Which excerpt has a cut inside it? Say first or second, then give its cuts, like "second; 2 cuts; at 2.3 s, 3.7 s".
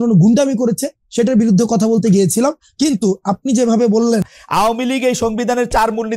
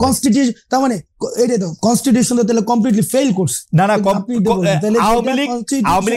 first; 1 cut; at 4.4 s